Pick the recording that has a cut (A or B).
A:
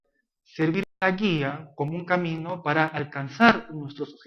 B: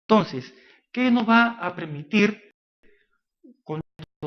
A